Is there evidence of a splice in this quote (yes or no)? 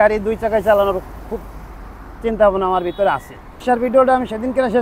yes